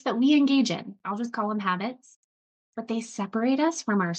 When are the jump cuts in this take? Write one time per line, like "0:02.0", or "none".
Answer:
none